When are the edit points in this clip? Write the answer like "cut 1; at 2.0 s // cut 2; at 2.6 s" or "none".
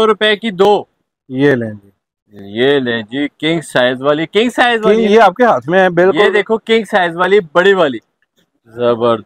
none